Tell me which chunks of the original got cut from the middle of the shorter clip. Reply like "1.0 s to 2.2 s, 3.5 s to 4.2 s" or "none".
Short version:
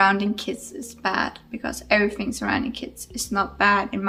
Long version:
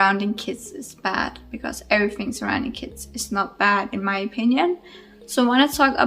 none